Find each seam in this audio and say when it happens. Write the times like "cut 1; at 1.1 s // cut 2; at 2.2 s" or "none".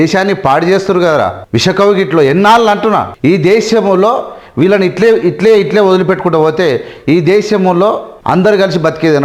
cut 1; at 1.4 s // cut 2; at 3.1 s // cut 3; at 8.1 s